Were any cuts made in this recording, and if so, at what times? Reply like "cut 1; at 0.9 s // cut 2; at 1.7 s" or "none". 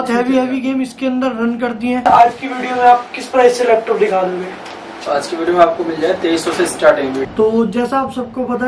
cut 1; at 2.0 s // cut 2; at 7.2 s